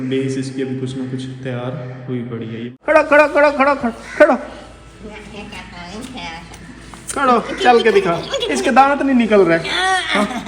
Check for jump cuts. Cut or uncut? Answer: cut